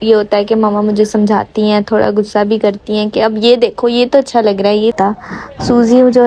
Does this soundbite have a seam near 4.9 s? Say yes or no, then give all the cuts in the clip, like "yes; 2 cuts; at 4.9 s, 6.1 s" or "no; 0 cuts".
yes; 1 cut; at 4.9 s